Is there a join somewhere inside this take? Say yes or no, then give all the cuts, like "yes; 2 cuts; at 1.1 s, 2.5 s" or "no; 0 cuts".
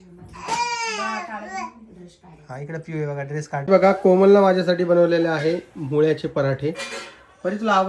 yes; 1 cut; at 3.6 s